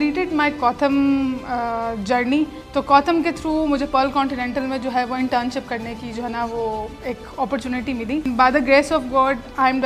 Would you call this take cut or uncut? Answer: cut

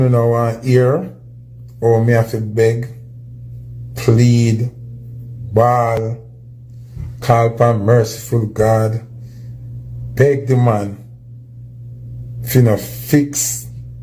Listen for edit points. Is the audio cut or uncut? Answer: uncut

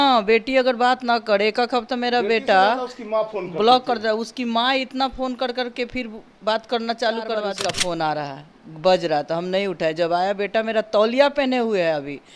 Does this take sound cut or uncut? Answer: cut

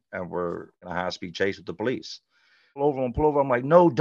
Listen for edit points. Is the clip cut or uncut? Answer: cut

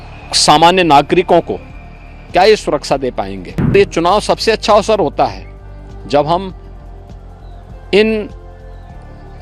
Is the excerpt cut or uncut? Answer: cut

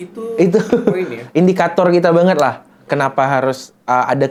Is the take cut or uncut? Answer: uncut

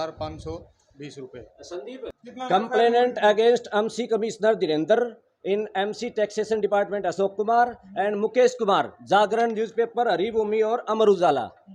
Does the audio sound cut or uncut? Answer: cut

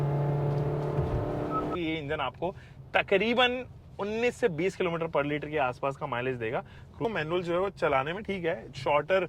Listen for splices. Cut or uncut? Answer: cut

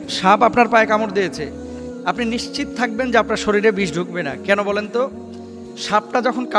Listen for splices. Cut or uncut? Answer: uncut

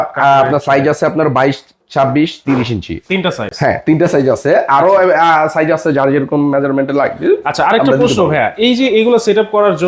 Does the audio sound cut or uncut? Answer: uncut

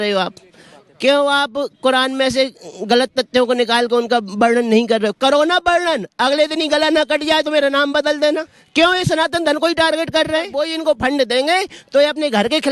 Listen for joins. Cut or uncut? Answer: cut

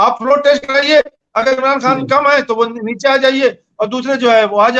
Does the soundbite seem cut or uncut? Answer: uncut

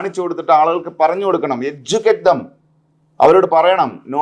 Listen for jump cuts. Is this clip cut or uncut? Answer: uncut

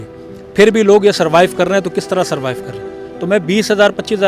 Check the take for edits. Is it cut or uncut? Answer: cut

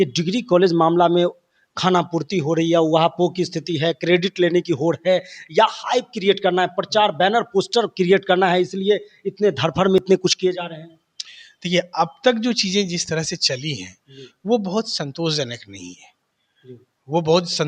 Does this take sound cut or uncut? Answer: uncut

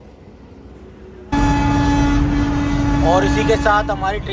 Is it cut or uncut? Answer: cut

